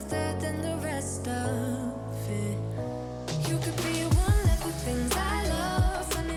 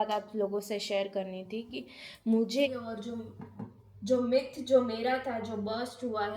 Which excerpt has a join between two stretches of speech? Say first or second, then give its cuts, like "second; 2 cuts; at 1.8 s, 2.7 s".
second; 1 cut; at 2.7 s